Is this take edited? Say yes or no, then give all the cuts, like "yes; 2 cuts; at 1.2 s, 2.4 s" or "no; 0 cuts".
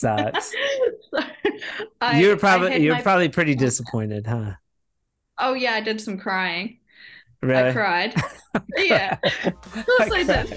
no; 0 cuts